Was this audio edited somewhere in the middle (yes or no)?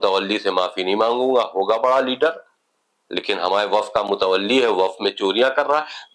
no